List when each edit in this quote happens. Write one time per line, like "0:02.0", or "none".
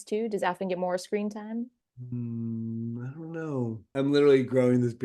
0:03.8